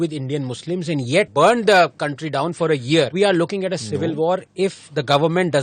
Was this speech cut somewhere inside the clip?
yes; 3 cuts; at 1.3 s, 3.1 s, 4.5 s

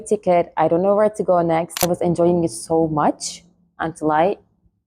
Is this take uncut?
no; 1 cut; at 1.9 s

